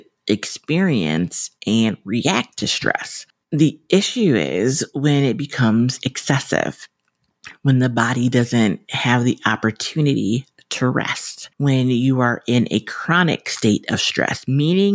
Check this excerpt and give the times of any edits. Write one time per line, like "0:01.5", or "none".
none